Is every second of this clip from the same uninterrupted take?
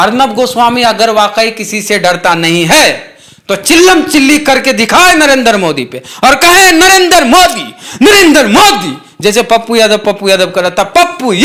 yes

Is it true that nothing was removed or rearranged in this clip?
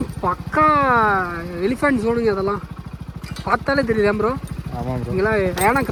yes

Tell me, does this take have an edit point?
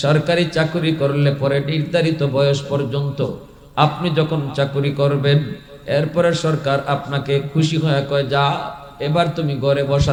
no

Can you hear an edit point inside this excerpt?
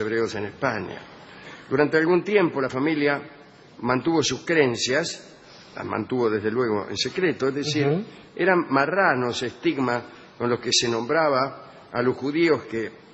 yes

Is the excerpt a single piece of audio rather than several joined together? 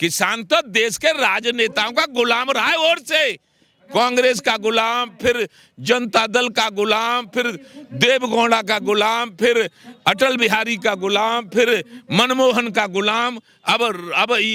yes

